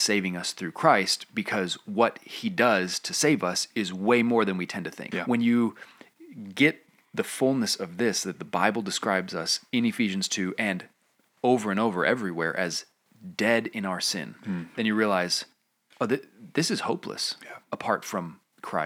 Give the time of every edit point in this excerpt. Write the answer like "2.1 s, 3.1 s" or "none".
5.0 s